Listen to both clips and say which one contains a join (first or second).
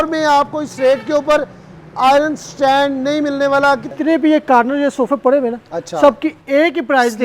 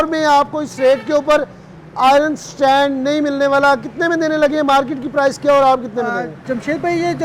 first